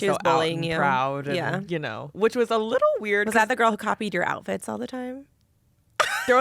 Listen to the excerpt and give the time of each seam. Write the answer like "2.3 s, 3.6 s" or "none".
2.0 s